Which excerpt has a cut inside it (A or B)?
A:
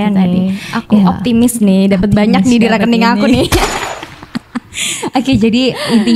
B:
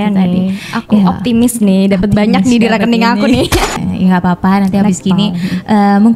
B